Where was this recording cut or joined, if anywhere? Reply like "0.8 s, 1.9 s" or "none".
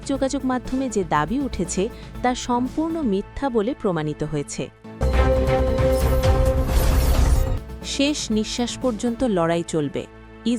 4.9 s